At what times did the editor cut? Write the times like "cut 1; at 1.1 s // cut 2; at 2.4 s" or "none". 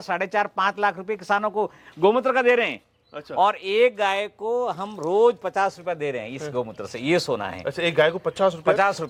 none